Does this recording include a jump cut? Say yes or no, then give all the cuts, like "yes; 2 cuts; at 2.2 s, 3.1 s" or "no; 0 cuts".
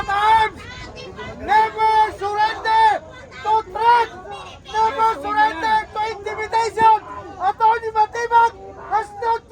no; 0 cuts